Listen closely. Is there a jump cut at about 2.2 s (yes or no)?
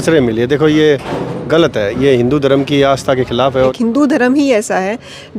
no